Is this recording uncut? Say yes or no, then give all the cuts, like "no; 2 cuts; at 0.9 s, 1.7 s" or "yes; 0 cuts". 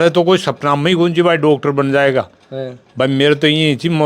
yes; 0 cuts